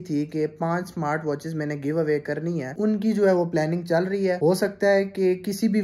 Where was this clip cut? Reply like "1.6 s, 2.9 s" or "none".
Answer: none

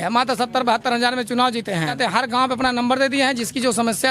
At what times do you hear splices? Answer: 2.0 s

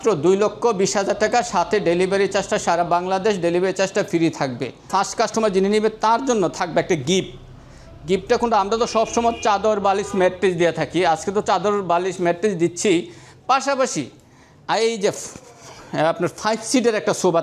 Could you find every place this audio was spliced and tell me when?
4.9 s

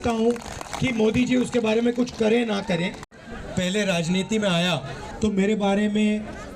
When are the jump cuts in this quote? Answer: 5.0 s

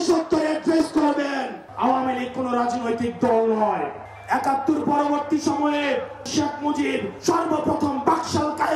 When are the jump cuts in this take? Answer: 1.6 s, 6.3 s

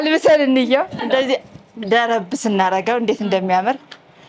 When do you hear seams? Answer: none

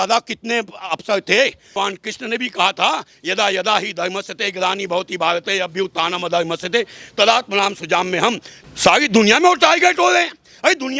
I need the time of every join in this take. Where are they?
1.7 s, 8.5 s

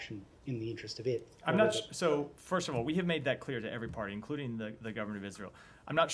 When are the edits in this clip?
none

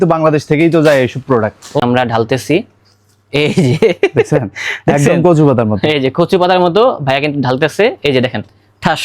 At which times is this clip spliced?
1.8 s

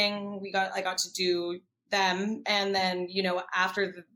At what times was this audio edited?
none

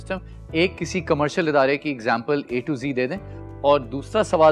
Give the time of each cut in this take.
none

